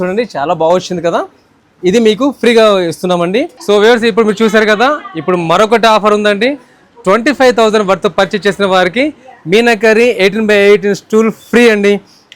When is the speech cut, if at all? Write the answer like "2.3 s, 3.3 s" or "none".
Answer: none